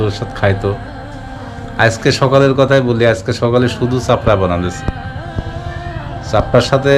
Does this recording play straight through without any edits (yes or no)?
yes